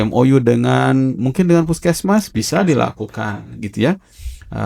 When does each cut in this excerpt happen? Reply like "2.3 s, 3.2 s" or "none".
none